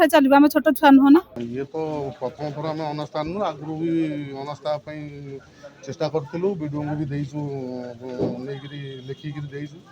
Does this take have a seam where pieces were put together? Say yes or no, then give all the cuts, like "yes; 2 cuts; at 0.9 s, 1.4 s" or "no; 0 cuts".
yes; 1 cut; at 1.4 s